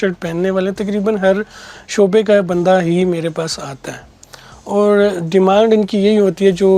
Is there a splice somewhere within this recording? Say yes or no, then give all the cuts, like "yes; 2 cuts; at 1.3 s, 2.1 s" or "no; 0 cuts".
no; 0 cuts